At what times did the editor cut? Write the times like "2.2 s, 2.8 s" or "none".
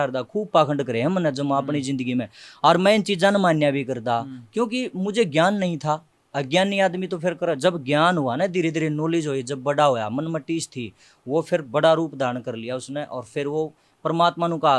none